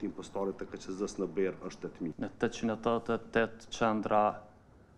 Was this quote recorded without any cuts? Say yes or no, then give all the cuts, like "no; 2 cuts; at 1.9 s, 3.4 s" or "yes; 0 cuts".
no; 1 cut; at 2.1 s